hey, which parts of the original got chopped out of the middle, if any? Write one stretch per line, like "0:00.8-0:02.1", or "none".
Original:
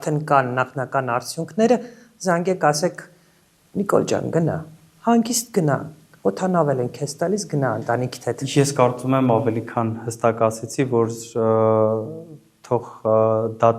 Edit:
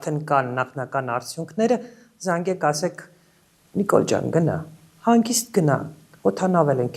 none

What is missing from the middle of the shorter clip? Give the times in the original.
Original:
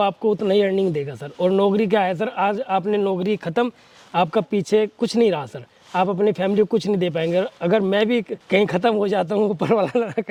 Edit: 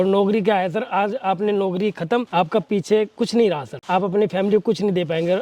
0:03.7-0:04.1
0:05.5-0:05.8

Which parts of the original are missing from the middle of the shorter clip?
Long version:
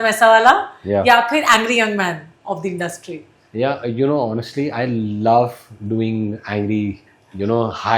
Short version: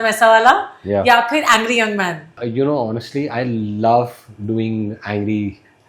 0:02.4-0:03.8

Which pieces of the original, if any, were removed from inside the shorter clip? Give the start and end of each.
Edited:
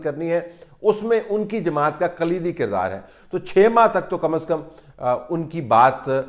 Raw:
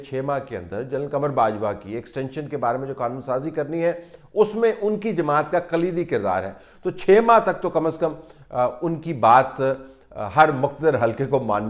none

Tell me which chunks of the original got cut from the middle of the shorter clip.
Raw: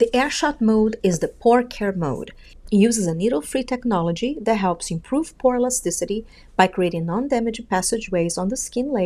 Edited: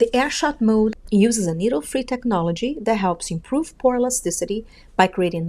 0:01.0-0:02.6

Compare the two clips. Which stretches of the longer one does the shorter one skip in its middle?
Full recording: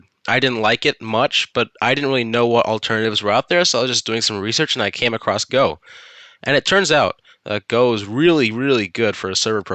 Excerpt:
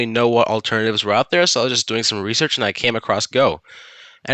none

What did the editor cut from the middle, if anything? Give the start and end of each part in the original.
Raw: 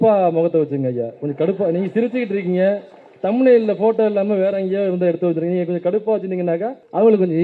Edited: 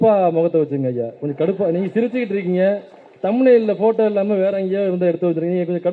none

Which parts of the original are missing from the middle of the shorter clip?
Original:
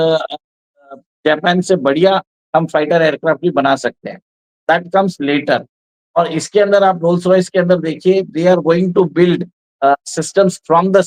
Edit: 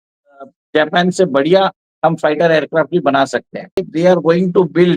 0:04.4-0:08.3

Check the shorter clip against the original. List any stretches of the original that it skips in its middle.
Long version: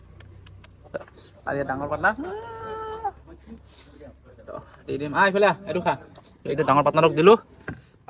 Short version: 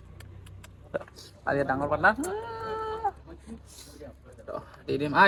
none

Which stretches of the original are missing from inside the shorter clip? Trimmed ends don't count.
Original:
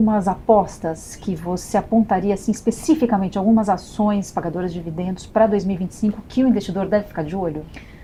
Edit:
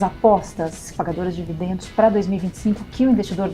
0:01.2-0:04.3

